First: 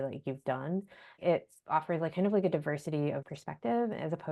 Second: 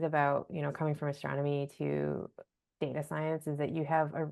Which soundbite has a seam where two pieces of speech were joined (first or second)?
first